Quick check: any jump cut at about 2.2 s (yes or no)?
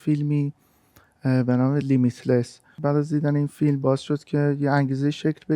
no